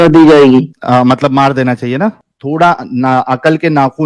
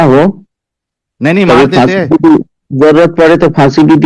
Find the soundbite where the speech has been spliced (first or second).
first